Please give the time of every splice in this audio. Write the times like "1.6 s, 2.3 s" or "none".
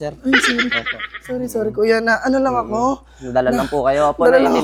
none

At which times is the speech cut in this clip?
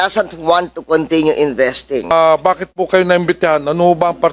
2.1 s

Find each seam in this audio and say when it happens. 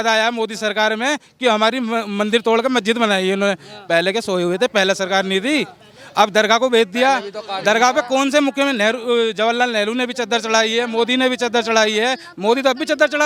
none

